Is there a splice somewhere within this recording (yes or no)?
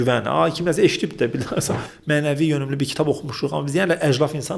yes